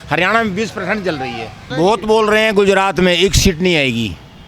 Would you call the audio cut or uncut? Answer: cut